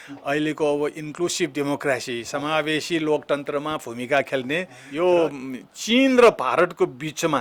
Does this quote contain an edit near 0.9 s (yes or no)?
no